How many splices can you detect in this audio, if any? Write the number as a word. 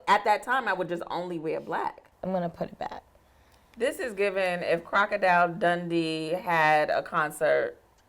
one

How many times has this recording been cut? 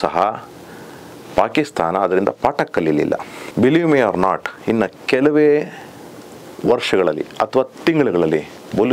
one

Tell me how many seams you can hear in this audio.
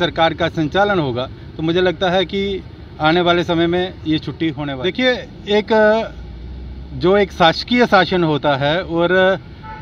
one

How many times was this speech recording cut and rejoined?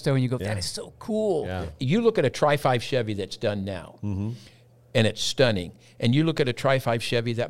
one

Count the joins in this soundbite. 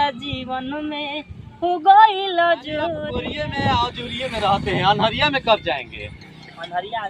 one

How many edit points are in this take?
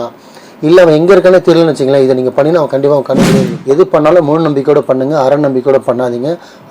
one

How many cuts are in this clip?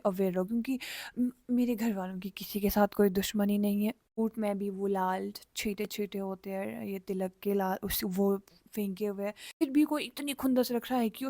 two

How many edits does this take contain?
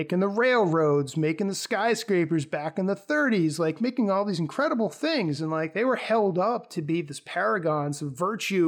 zero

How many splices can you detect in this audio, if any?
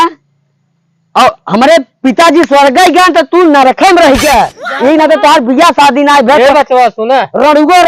zero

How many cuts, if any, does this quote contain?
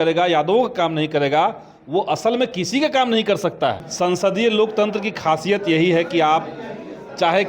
one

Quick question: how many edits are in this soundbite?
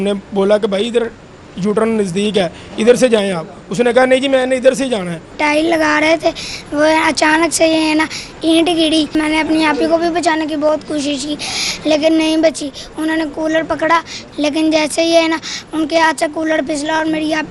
three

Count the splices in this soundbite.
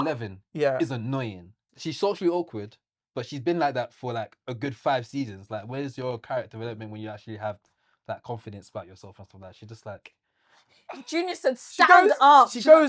one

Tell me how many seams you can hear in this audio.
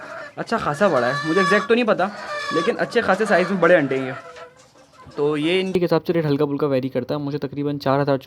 one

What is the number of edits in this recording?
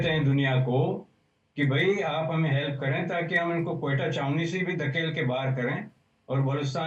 zero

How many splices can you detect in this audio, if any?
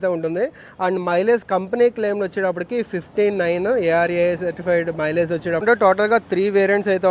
one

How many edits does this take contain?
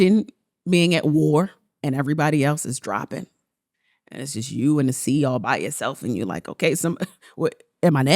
two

